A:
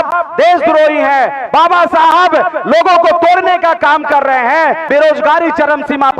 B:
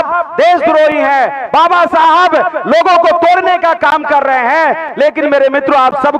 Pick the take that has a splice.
A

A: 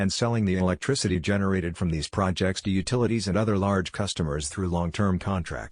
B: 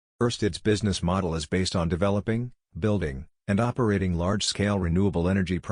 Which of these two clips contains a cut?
B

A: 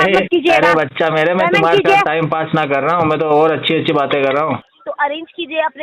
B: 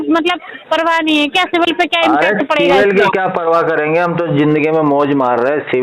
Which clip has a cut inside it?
A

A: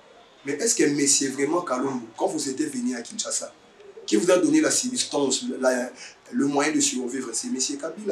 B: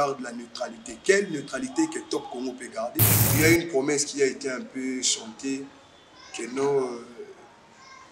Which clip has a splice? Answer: B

